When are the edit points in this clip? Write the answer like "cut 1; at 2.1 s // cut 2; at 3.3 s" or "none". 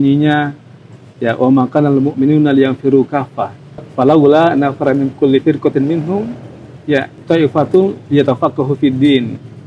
cut 1; at 3.9 s // cut 2; at 7.1 s